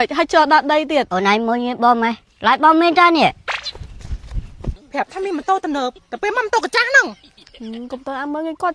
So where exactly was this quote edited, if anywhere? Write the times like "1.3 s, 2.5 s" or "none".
1.1 s, 4.7 s